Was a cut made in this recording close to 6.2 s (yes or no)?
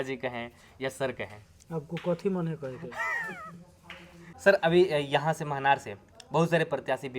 no